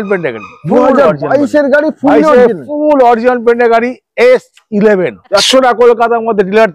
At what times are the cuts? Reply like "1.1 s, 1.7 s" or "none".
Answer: 5.4 s